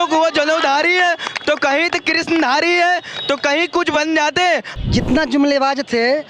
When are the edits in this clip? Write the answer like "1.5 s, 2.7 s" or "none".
4.7 s